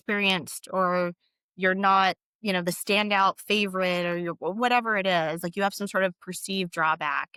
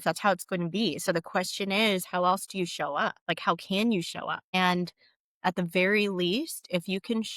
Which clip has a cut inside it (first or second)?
second